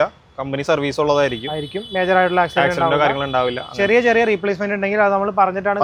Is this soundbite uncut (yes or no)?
yes